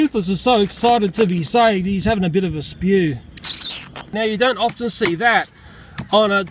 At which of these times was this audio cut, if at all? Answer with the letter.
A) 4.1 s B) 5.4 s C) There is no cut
A